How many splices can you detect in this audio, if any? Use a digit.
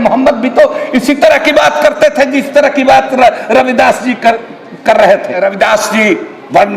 1